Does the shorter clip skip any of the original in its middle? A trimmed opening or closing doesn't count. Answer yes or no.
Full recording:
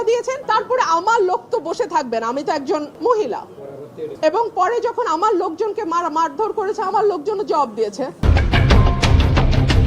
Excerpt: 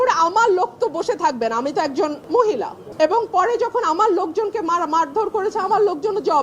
yes